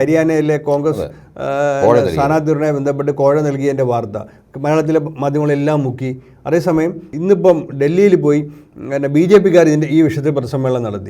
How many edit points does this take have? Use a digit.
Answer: 0